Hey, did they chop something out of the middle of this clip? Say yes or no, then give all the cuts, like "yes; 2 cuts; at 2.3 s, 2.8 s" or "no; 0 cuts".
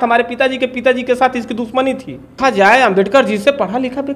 yes; 1 cut; at 2.4 s